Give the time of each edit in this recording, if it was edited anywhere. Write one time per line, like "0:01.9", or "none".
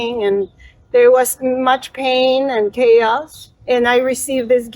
0:03.6